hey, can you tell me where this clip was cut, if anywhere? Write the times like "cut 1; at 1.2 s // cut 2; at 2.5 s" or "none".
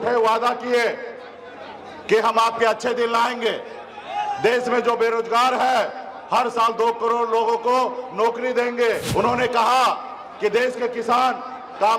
cut 1; at 9.1 s